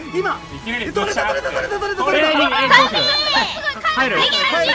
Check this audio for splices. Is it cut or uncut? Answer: uncut